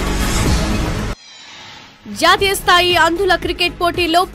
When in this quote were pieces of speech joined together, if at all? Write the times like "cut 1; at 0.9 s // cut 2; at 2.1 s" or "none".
cut 1; at 1.1 s